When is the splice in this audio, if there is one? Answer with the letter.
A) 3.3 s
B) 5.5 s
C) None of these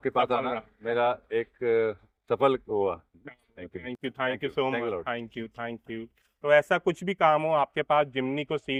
C